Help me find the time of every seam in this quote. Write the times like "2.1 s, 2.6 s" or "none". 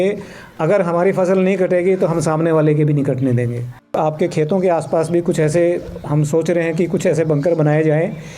3.9 s